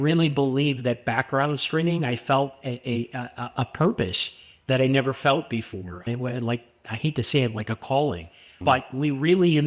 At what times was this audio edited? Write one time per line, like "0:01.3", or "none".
none